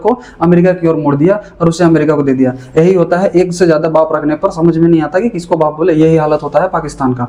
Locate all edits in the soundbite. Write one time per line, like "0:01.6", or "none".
none